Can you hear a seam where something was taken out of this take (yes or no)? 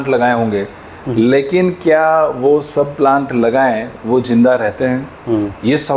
no